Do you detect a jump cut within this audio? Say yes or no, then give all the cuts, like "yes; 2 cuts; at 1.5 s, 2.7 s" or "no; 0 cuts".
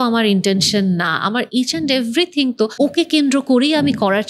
yes; 1 cut; at 2.7 s